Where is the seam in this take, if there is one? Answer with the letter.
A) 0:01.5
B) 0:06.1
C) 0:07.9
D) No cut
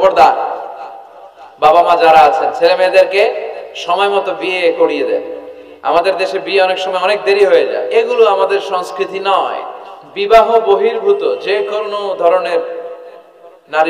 C